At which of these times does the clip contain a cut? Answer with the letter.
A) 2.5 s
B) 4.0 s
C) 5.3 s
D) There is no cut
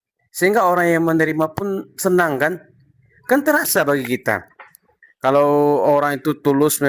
D